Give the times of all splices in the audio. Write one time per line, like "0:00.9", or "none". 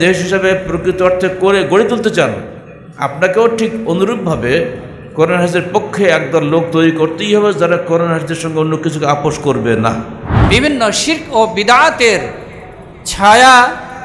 0:10.3